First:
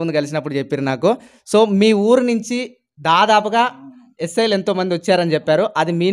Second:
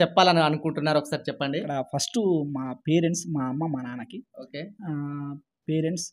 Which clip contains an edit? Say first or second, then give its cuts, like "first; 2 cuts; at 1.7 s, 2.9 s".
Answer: second; 1 cut; at 1.7 s